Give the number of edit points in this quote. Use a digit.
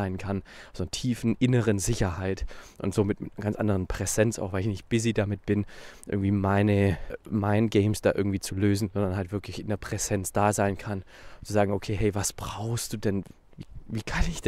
2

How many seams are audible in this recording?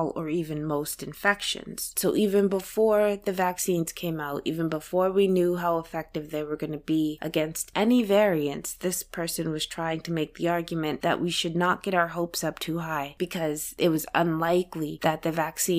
1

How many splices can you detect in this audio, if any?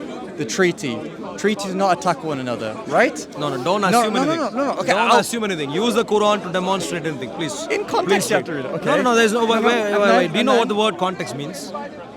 0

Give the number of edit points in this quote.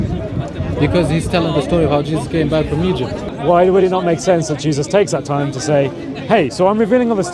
1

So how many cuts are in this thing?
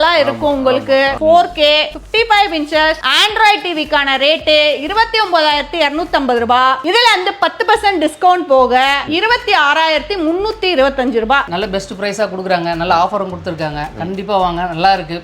4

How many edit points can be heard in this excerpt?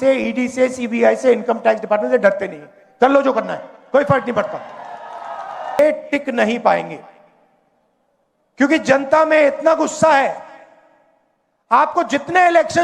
1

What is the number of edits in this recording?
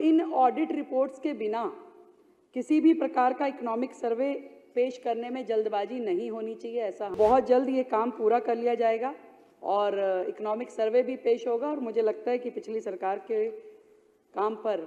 1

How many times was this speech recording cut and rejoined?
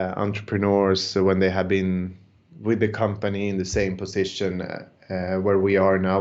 0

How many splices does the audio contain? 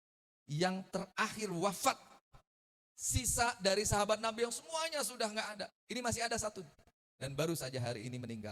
0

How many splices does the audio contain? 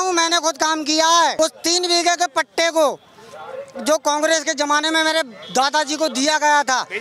1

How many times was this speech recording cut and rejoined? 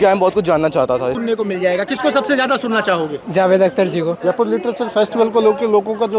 2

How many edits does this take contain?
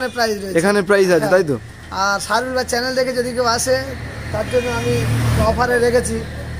1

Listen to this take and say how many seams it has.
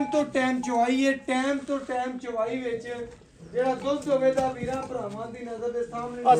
0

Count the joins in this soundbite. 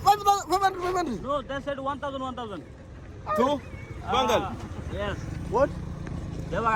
0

